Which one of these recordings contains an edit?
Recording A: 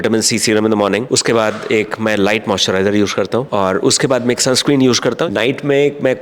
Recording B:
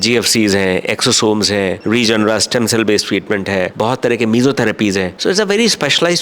A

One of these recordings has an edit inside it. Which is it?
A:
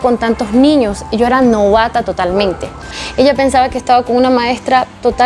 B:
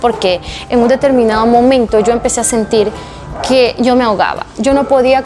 A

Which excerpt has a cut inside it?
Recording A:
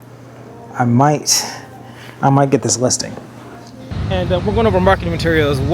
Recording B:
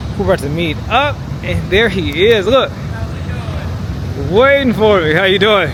A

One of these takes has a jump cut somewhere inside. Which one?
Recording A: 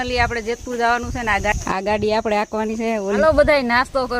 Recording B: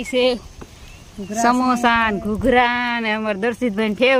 A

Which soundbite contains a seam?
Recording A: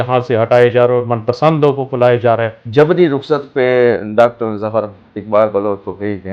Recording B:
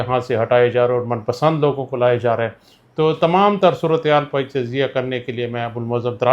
A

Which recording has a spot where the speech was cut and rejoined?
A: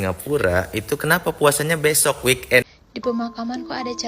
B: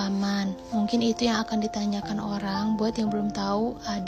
A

